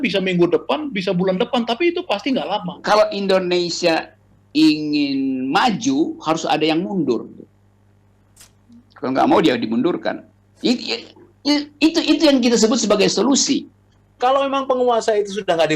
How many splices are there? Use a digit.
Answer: 2